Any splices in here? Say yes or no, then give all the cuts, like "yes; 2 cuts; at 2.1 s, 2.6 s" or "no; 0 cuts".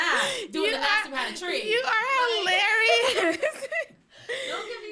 no; 0 cuts